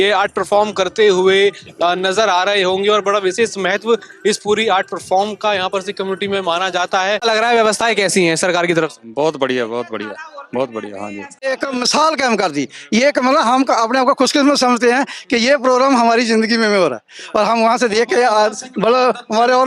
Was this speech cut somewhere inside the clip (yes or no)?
yes